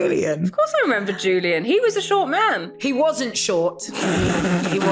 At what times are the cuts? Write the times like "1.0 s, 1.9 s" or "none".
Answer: 2.7 s